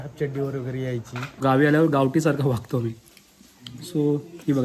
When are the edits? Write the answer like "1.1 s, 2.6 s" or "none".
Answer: 1.4 s